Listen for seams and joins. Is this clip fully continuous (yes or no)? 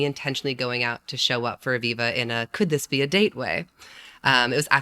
yes